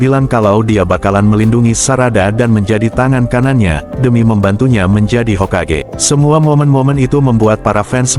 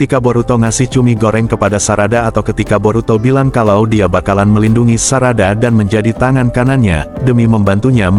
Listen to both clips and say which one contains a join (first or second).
first